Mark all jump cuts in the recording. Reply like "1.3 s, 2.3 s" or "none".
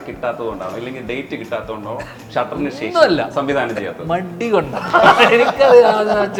none